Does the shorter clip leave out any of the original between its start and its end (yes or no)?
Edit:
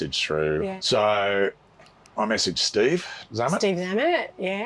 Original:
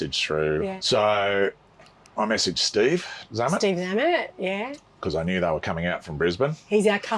no